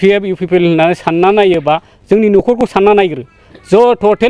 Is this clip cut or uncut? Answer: uncut